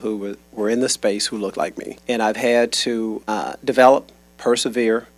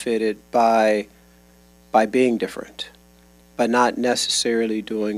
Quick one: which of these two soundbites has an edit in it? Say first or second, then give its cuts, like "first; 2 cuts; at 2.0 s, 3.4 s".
first; 2 cuts; at 1.9 s, 3.2 s